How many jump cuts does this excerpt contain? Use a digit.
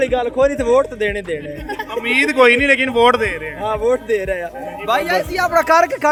0